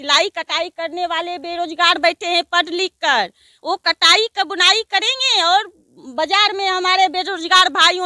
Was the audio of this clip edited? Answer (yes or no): no